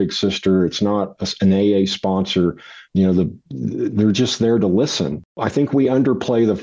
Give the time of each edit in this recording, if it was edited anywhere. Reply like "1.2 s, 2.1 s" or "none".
5.3 s